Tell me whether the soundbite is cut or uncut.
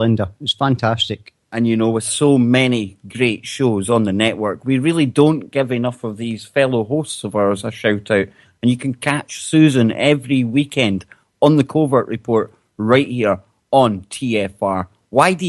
cut